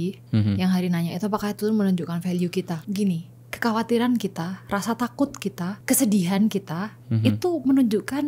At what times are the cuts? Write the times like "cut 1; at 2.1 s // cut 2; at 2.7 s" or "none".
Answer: cut 1; at 2.8 s // cut 2; at 5.8 s